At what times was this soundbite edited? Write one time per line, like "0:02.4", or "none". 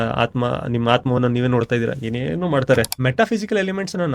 0:02.9